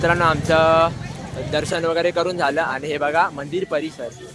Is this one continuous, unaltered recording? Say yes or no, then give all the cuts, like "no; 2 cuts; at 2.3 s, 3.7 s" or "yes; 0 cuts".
yes; 0 cuts